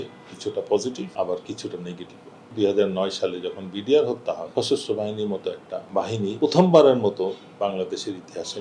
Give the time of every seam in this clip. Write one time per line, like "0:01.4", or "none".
0:01.1
0:02.5
0:04.4
0:06.2